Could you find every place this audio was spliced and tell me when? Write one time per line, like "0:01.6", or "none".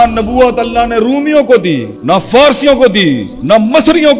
0:01.9
0:03.3